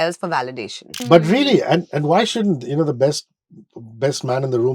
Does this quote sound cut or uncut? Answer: cut